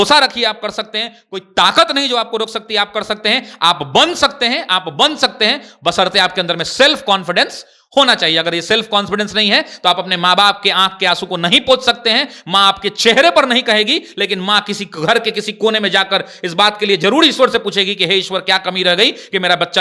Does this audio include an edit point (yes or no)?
no